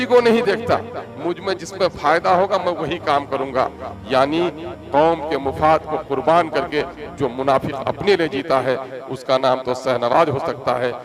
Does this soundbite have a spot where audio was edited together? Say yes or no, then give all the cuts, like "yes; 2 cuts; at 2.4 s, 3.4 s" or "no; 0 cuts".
no; 0 cuts